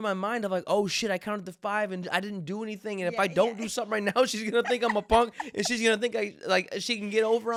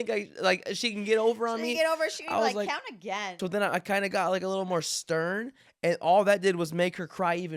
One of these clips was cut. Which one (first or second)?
second